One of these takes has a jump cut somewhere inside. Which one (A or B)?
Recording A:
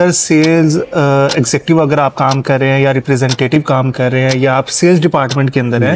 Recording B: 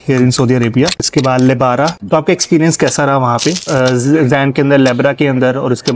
B